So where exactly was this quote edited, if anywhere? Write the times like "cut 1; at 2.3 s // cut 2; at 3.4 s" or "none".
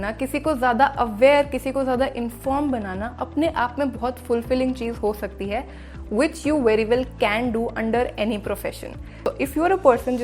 cut 1; at 9.1 s

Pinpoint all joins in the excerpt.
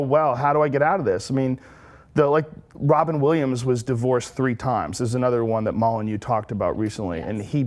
cut 1; at 1.7 s

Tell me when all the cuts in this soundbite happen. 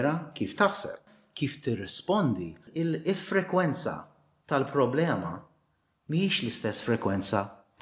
cut 1; at 1.1 s // cut 2; at 2.6 s

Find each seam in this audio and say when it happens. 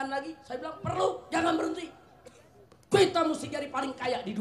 none

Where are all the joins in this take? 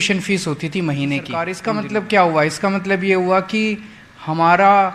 cut 1; at 1.5 s

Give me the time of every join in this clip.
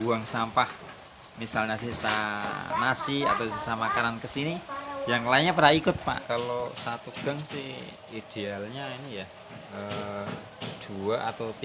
cut 1; at 6.2 s

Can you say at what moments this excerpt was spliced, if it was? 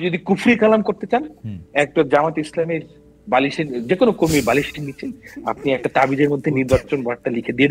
none

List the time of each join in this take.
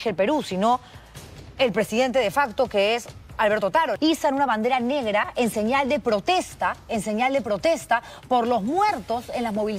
cut 1; at 3.9 s

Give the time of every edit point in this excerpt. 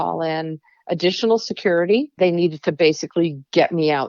cut 1; at 2.1 s

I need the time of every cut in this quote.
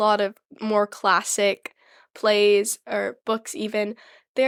none

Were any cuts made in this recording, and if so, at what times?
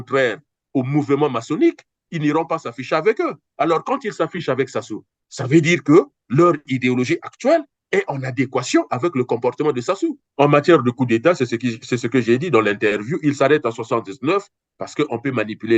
cut 1; at 10.2 s

